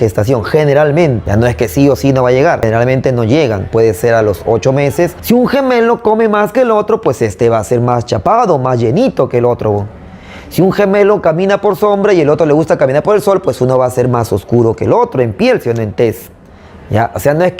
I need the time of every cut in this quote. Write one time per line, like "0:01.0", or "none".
0:01.2
0:02.6
0:05.2